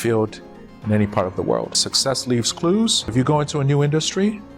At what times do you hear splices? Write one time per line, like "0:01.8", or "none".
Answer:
0:01.9
0:03.1